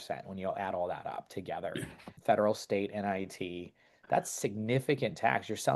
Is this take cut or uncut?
cut